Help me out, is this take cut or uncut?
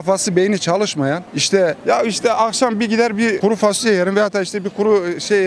uncut